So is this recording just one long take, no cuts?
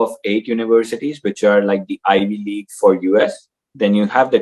yes; 0 cuts

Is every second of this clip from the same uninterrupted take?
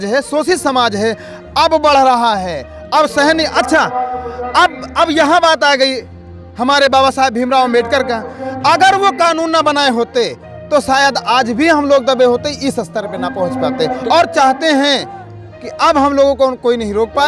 yes; 0 cuts

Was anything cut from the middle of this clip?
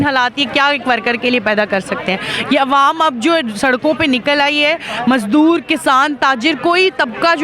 no; 0 cuts

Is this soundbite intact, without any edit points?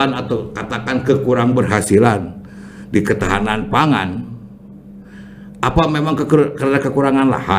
yes; 0 cuts

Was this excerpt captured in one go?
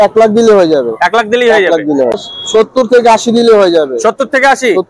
no; 1 cut; at 2.2 s

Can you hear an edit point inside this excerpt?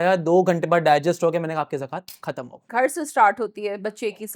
yes; 1 cut; at 2.6 s

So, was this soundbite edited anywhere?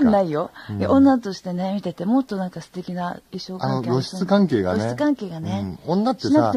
yes; 1 cut; at 2.4 s

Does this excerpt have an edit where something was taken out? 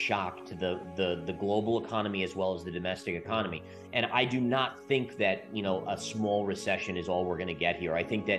no; 0 cuts

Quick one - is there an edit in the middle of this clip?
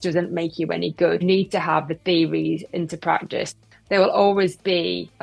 yes; 2 cuts; at 1.2 s, 3.5 s

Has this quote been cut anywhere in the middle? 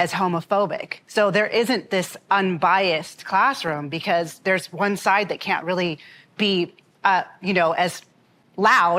no; 0 cuts

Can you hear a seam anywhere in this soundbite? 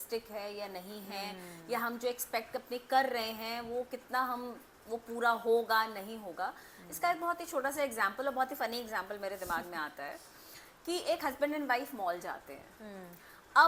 no; 0 cuts

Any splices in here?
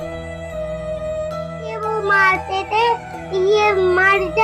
yes; 1 cut; at 1.8 s

